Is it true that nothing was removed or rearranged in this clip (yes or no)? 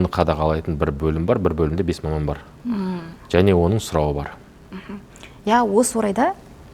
yes